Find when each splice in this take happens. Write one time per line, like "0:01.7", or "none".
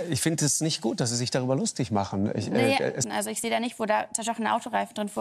0:03.0